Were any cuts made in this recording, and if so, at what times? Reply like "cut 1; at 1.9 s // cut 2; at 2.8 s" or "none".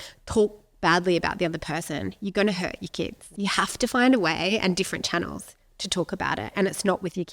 cut 1; at 3.2 s